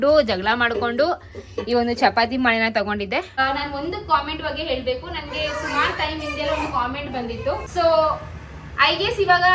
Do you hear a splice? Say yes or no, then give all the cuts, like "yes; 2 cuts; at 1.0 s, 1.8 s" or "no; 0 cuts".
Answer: yes; 2 cuts; at 3.4 s, 7.7 s